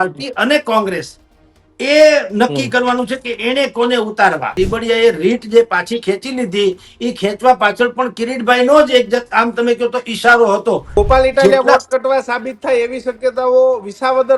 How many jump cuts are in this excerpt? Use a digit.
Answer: 2